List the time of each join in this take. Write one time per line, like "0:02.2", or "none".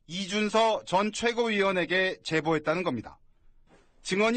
0:01.1

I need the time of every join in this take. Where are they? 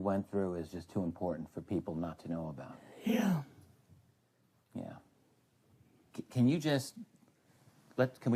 0:02.2

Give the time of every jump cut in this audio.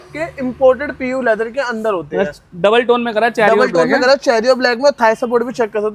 none

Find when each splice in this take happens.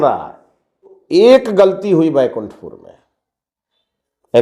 0:01.0

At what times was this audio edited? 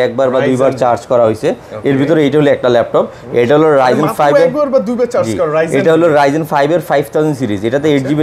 none

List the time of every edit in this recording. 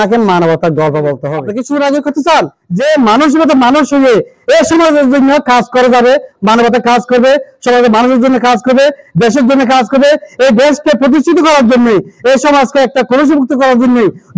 0:01.4
0:02.6

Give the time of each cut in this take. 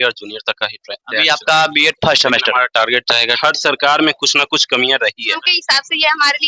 0:03.4
0:05.5

